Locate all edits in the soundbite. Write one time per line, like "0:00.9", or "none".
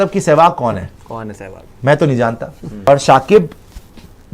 0:02.9